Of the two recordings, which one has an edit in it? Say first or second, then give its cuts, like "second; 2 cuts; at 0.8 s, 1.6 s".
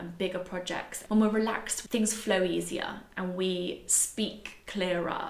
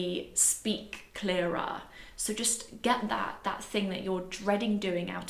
first; 1 cut; at 1.7 s